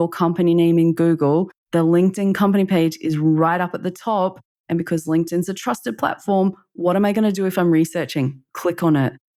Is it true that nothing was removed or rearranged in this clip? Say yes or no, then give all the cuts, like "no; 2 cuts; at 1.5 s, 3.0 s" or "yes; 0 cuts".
yes; 0 cuts